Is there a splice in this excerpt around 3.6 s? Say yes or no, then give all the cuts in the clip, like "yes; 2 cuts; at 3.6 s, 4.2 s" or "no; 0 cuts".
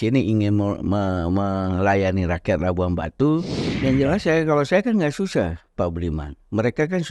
yes; 1 cut; at 3.6 s